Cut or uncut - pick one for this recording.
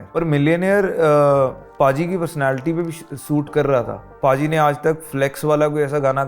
cut